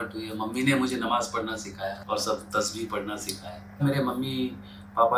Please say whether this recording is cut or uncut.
cut